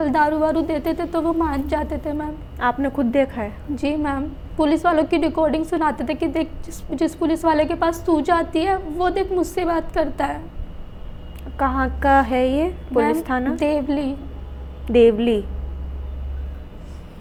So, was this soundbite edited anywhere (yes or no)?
no